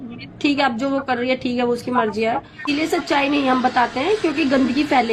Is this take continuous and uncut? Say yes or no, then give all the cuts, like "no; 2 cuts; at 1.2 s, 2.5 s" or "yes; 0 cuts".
no; 1 cut; at 2.4 s